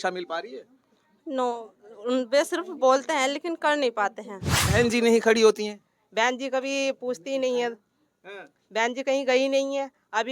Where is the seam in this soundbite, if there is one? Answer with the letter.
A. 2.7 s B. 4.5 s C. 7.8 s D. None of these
B